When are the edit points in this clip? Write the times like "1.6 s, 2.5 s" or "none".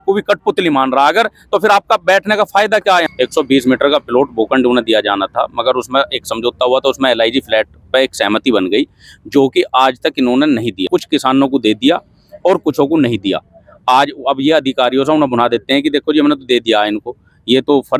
3.1 s, 10.8 s